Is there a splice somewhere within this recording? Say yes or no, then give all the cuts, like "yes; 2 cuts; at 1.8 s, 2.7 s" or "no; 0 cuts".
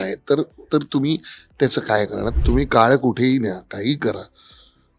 yes; 1 cut; at 2.3 s